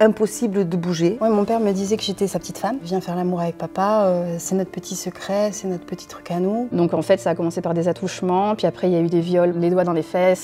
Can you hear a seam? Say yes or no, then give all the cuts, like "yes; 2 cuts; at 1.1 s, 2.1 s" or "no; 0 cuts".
yes; 3 cuts; at 1.2 s, 6.7 s, 9.6 s